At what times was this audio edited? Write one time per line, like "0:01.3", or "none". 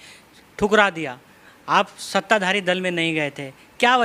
none